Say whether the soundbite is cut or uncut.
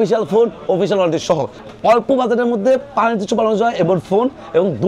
cut